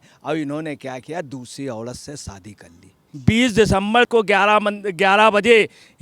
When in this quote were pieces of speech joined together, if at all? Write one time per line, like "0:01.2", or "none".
0:03.0